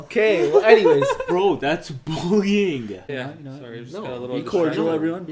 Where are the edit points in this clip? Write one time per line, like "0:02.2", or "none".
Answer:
0:03.1